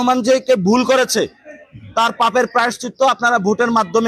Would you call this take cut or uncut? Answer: uncut